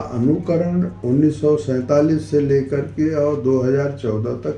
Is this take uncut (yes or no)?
no